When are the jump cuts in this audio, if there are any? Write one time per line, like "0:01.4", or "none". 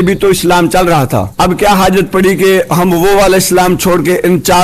0:01.3